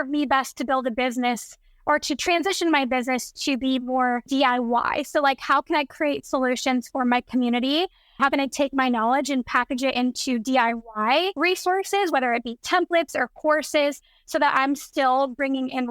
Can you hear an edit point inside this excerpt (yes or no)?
yes